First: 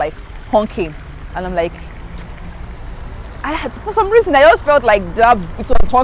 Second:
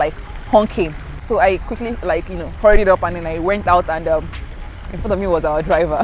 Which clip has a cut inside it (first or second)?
second